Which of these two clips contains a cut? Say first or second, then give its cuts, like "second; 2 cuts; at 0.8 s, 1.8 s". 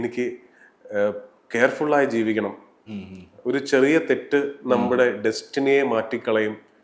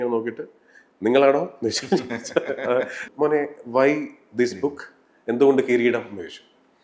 second; 1 cut; at 3.0 s